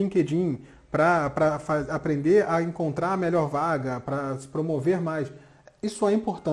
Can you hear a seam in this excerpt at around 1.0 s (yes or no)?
no